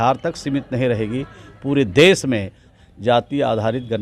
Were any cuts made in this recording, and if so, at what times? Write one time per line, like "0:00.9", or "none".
0:02.7